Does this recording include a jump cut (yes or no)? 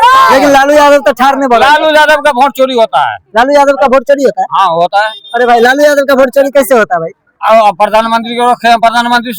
no